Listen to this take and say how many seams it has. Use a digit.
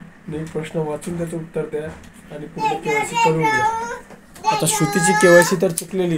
0